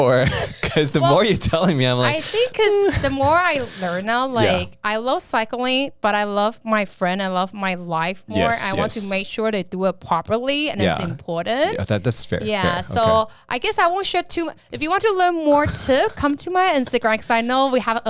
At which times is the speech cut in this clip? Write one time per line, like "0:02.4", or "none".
none